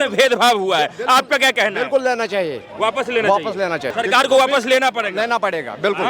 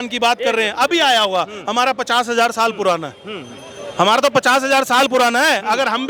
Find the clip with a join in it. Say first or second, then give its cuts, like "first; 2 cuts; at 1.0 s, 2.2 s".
first; 1 cut; at 3.9 s